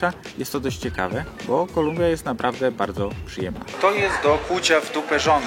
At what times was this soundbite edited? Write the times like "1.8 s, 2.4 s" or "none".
3.5 s